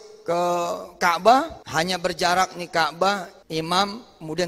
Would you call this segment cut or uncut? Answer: cut